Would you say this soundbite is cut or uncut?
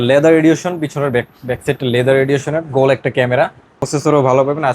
cut